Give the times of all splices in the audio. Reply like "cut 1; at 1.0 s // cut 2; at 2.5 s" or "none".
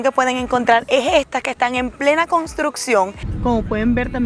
cut 1; at 3.2 s

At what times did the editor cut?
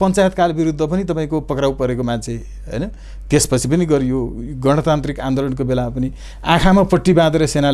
none

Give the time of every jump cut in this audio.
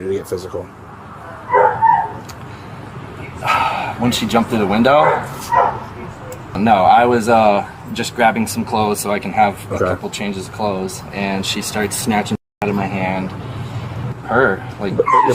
cut 1; at 6.6 s // cut 2; at 14.1 s

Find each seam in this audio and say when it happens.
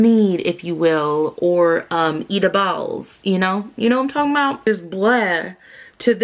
cut 1; at 4.6 s

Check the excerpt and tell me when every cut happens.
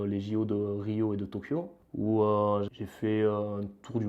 cut 1; at 2.7 s

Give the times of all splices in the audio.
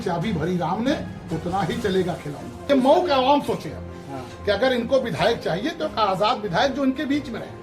cut 1; at 2.7 s

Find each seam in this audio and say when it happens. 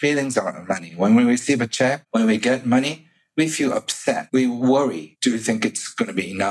cut 1; at 2.0 s // cut 2; at 4.2 s // cut 3; at 5.1 s

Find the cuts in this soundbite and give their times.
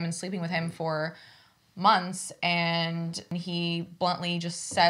cut 1; at 3.3 s

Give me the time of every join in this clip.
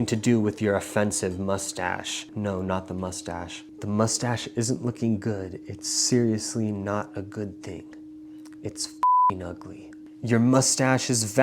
cut 1; at 2.2 s // cut 2; at 3.6 s // cut 3; at 10.2 s

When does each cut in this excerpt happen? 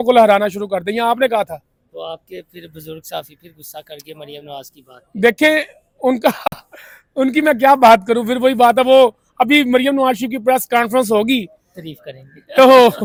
none

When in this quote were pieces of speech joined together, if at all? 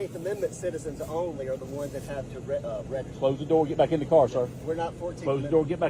none

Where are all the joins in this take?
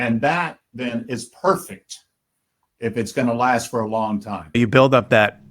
cut 1; at 4.5 s

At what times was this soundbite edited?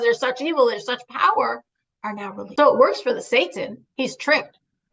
cut 1; at 2.4 s

